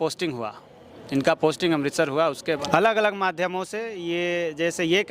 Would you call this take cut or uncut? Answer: cut